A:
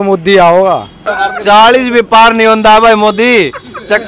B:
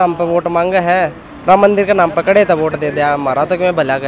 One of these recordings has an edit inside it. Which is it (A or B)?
A